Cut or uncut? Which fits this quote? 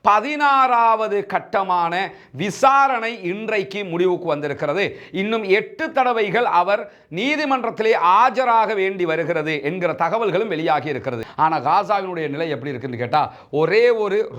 cut